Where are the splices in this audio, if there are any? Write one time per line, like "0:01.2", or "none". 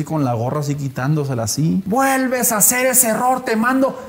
0:01.8

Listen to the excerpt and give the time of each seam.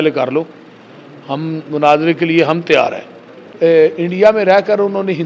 0:03.5

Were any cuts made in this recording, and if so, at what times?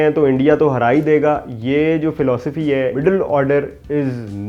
0:03.0

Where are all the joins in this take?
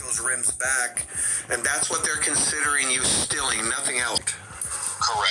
0:04.3

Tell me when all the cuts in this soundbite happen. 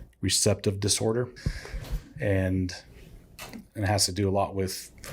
0:01.4

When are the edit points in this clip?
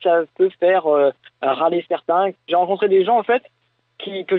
0:02.4

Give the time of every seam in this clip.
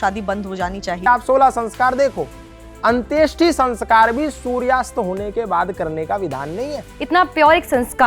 0:01.1
0:06.9

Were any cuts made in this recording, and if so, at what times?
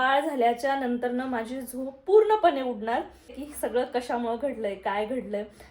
0:03.4

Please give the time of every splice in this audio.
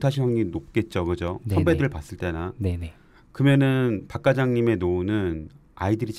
none

